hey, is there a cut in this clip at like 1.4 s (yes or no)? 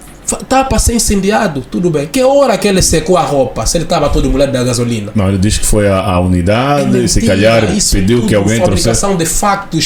no